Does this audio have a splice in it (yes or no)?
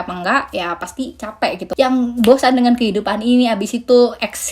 yes